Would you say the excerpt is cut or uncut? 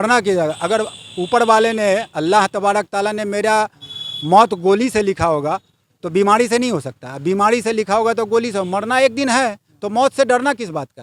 uncut